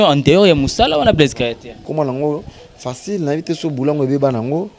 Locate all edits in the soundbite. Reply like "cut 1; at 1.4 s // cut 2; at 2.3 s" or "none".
cut 1; at 1.9 s